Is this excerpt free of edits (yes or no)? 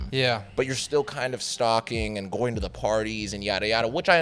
yes